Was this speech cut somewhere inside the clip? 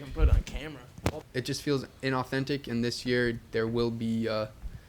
yes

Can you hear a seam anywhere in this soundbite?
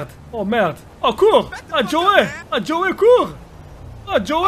yes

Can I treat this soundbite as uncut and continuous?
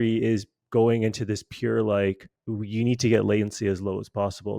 no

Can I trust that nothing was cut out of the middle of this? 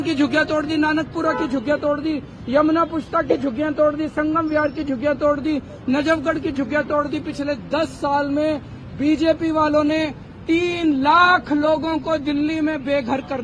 yes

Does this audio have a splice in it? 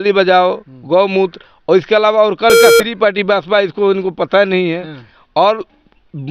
yes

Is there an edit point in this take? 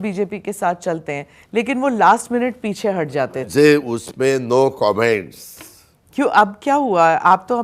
yes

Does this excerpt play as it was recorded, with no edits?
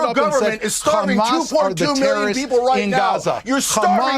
no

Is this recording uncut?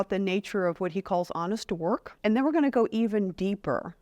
no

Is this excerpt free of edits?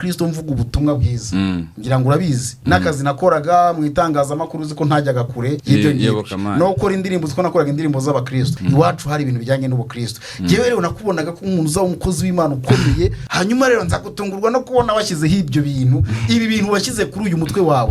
no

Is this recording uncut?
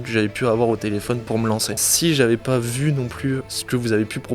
no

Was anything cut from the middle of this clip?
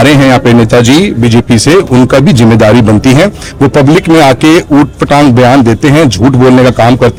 no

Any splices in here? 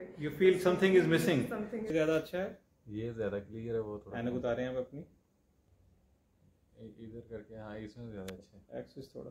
yes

